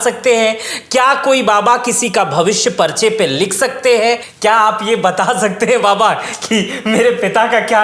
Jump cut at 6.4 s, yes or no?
no